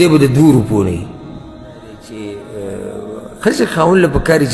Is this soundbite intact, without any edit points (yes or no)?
no